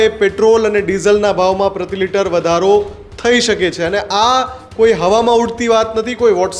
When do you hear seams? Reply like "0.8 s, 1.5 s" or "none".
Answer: none